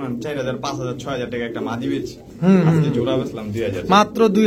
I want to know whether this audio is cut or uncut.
uncut